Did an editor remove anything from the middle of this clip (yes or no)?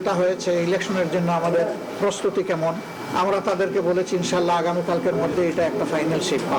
yes